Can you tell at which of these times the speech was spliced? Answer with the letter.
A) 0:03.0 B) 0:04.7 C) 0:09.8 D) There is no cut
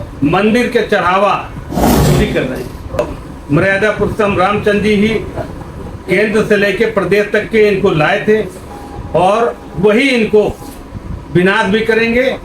A